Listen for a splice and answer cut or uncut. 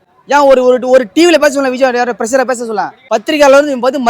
cut